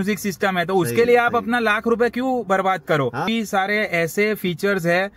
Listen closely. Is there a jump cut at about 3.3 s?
yes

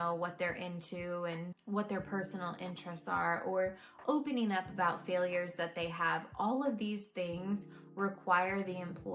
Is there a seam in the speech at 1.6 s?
yes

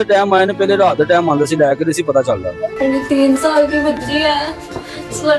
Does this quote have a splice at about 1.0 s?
no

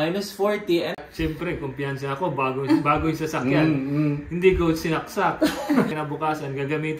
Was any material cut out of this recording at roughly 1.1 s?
yes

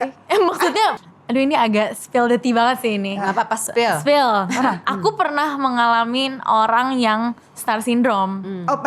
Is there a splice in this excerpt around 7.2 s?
no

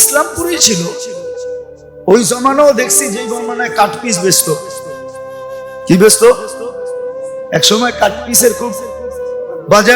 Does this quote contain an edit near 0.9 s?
no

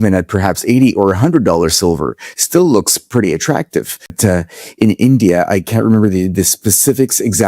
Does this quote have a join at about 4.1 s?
yes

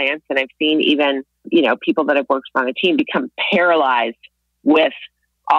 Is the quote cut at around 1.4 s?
yes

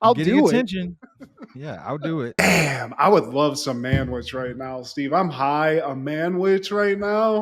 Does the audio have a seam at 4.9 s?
no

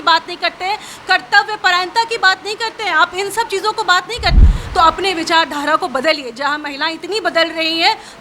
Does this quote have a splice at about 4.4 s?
yes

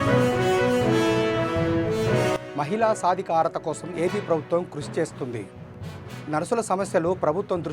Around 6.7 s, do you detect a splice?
no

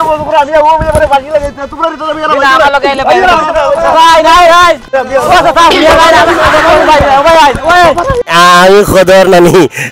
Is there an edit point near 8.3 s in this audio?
yes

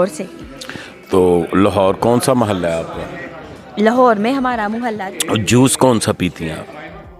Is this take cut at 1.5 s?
no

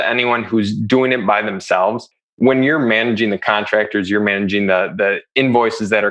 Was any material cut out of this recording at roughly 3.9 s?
no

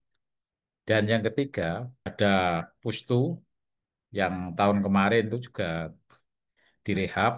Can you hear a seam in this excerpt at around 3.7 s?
no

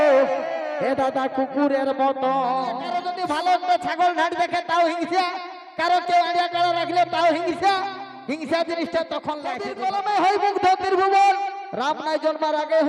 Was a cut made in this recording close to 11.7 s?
no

